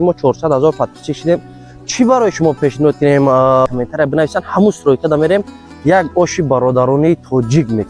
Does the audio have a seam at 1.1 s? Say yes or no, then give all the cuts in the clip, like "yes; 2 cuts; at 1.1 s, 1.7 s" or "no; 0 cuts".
no; 1 cut; at 3.7 s